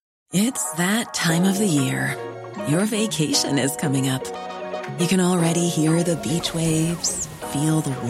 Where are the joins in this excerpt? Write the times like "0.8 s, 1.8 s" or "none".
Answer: none